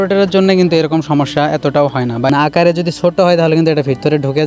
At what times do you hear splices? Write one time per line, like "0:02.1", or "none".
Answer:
0:02.3